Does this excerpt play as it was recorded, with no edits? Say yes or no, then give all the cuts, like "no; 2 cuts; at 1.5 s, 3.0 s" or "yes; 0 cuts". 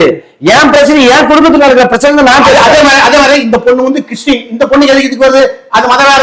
yes; 0 cuts